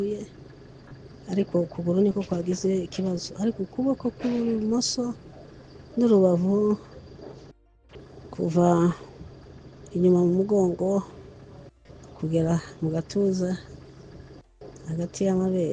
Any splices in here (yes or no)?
no